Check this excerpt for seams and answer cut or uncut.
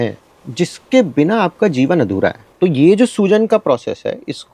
cut